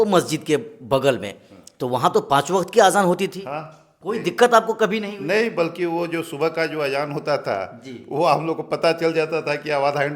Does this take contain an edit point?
no; 0 cuts

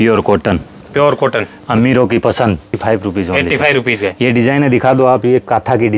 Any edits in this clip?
yes; 1 cut; at 2.7 s

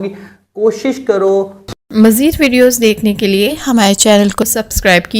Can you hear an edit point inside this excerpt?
yes; 1 cut; at 1.6 s

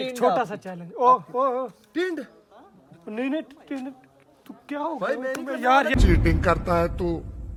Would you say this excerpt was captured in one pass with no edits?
yes; 0 cuts

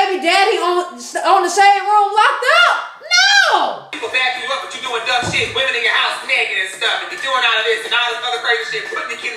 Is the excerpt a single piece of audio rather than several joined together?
no; 1 cut; at 3.9 s

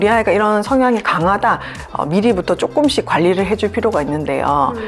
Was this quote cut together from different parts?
yes; 1 cut; at 1.8 s

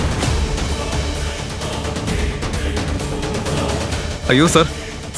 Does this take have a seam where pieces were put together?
yes; 1 cut; at 4.1 s

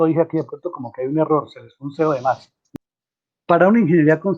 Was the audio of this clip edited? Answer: yes; 1 cut; at 2.7 s

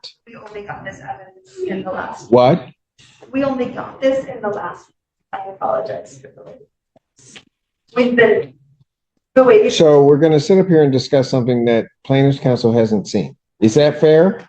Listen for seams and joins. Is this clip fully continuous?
no; 1 cut; at 13.4 s

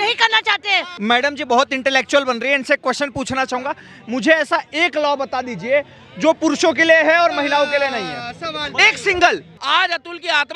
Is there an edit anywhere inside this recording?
yes; 2 cuts; at 0.9 s, 9.5 s

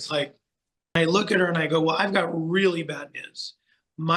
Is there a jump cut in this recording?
yes; 1 cut; at 1.0 s

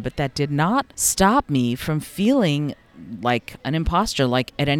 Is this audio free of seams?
no; 1 cut; at 1.0 s

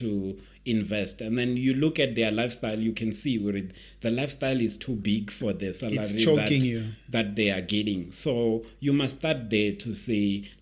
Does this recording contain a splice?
no; 0 cuts

